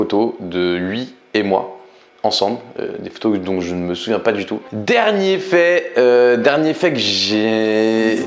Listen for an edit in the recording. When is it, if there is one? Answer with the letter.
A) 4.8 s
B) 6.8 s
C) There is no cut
A